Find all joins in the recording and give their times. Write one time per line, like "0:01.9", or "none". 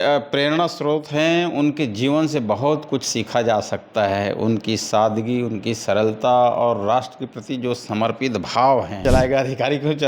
0:09.0